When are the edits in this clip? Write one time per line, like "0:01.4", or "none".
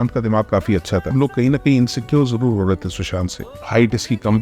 0:01.1
0:03.6